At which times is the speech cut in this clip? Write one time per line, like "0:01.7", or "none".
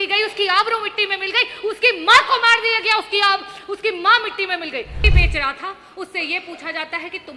0:05.1